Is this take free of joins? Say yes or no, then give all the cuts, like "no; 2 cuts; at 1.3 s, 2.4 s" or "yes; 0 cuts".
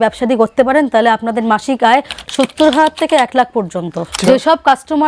no; 1 cut; at 4.1 s